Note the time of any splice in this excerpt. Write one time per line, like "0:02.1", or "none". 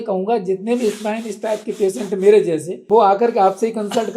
0:02.7